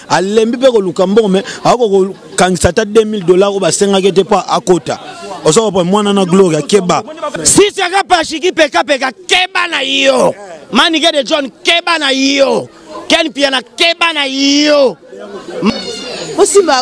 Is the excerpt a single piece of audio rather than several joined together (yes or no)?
no